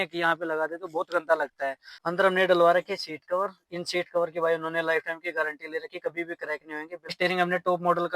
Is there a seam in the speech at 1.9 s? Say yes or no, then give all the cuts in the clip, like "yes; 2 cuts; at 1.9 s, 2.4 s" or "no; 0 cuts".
yes; 2 cuts; at 1.9 s, 7.2 s